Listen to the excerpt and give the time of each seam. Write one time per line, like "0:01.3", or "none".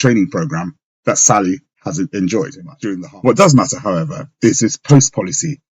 0:02.7